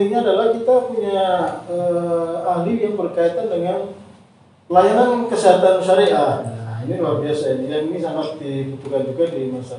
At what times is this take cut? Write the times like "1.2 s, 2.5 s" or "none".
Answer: none